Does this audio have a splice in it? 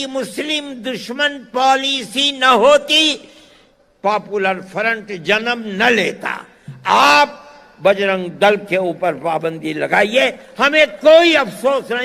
no; 0 cuts

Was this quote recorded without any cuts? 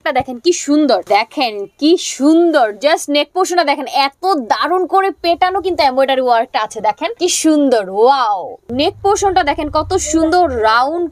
no; 3 cuts; at 1.0 s, 7.1 s, 8.7 s

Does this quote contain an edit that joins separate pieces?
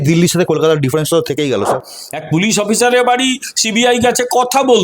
yes; 1 cut; at 1.8 s

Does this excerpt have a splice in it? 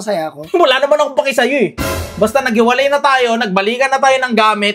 no; 0 cuts

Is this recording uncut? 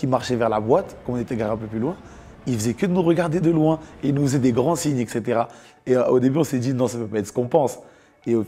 yes; 0 cuts

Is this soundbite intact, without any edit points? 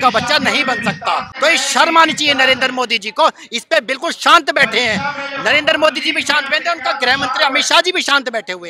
no; 1 cut; at 1.3 s

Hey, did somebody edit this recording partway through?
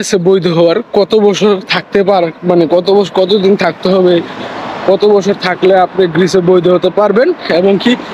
no; 0 cuts

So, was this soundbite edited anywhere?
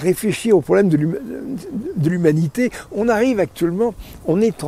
no; 0 cuts

